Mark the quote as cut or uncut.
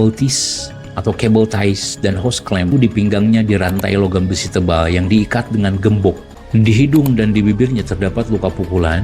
cut